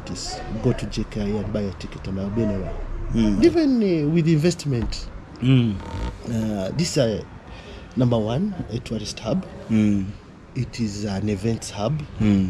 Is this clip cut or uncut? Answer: cut